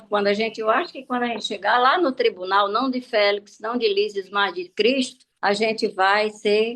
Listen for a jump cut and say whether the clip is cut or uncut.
cut